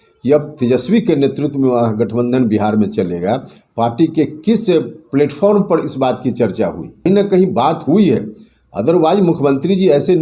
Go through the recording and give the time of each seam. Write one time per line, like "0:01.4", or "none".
0:07.1